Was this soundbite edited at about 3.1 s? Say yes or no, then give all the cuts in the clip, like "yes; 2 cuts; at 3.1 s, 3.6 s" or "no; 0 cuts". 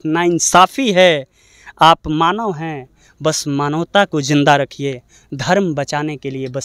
no; 0 cuts